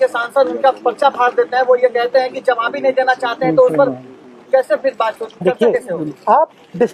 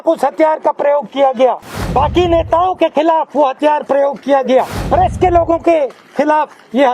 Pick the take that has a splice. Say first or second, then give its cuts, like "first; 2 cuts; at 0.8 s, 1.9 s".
second; 2 cuts; at 1.7 s, 4.8 s